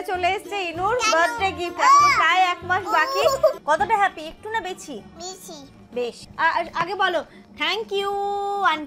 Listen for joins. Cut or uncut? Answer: cut